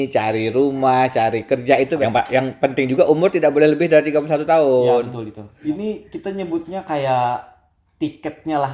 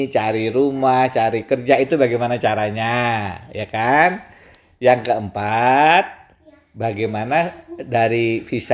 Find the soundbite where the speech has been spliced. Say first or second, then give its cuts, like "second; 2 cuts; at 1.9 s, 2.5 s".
first; 2 cuts; at 1.9 s, 5.4 s